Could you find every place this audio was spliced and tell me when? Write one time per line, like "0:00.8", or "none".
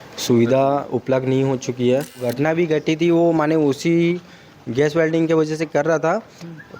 0:02.5

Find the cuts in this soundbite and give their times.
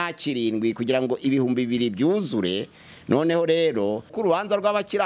0:04.1

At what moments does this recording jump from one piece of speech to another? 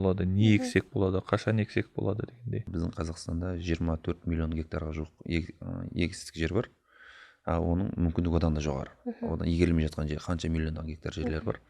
0:02.6

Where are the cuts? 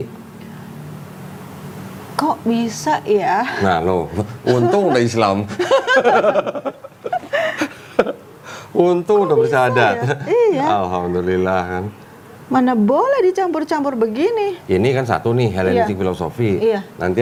none

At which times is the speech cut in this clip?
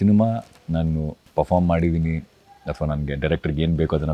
0:01.2

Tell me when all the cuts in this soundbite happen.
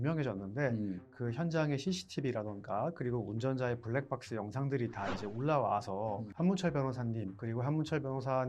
0:01.1
0:06.3
0:07.4

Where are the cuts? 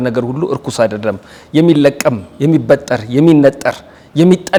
none

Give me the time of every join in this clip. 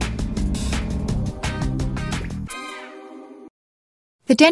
0:03.5

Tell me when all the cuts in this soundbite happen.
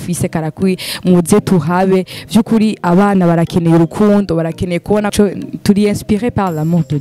0:05.1

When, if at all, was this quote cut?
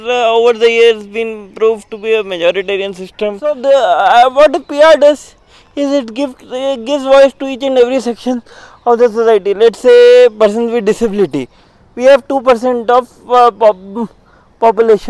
0:03.5

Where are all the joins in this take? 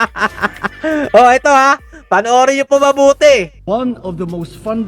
none

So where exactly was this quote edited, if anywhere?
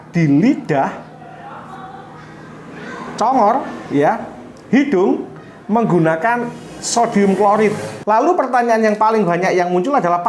0:07.9

